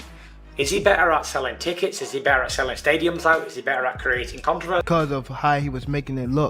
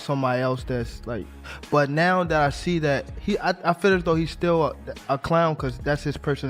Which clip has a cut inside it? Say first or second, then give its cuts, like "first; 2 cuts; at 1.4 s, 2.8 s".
first; 1 cut; at 4.8 s